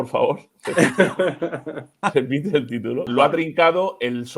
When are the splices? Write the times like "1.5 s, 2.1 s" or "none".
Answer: 3.1 s